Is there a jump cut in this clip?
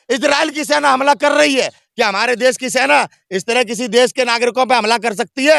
no; 0 cuts

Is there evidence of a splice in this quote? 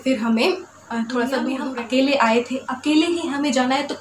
yes; 1 cut; at 1.6 s

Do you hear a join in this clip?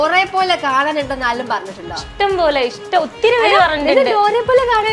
no; 0 cuts

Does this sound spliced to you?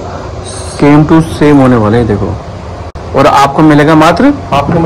no; 0 cuts

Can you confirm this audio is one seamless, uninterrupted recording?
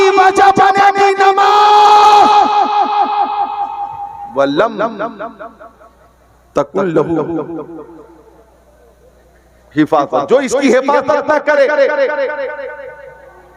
yes; 0 cuts

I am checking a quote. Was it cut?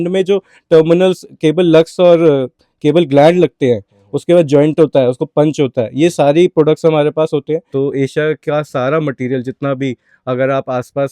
yes; 1 cut; at 7.7 s

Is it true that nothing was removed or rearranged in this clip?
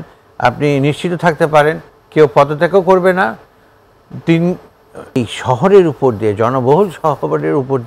no; 1 cut; at 5.2 s

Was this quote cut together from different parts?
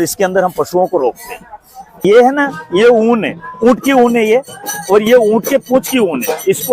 yes; 1 cut; at 2.0 s

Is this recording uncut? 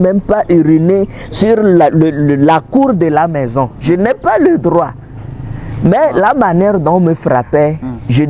yes; 0 cuts

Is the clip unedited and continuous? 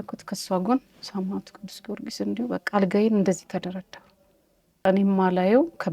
no; 1 cut; at 4.8 s

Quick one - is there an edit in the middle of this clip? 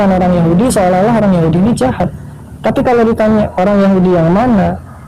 no; 0 cuts

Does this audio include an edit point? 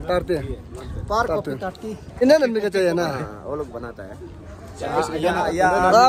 yes; 1 cut; at 2.2 s

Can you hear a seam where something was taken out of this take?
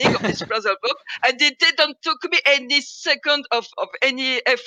no; 0 cuts

